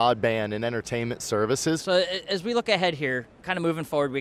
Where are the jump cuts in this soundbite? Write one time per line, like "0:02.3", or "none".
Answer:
0:01.8
0:03.4